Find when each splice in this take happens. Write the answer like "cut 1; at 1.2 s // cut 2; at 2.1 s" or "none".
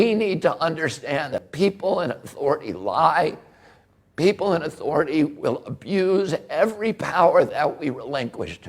cut 1; at 1.4 s